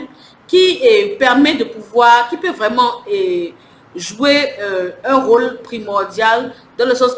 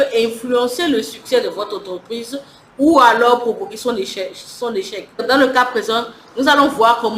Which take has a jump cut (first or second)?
second